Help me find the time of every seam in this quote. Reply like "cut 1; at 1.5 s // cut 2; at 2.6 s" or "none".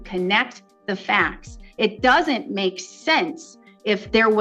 none